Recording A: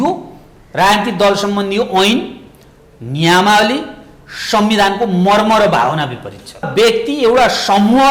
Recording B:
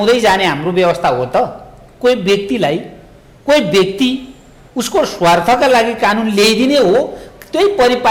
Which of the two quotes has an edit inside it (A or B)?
A